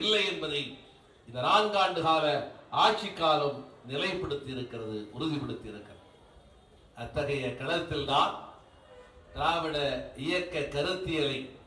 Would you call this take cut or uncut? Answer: uncut